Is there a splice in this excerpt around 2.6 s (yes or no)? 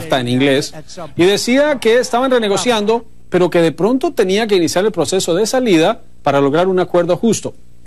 no